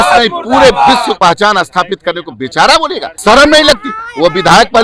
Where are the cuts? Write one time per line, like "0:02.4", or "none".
0:01.2
0:03.1